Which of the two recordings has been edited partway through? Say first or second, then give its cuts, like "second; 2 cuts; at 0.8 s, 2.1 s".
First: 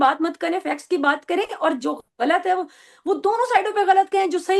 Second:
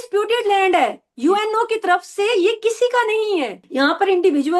second; 1 cut; at 3.6 s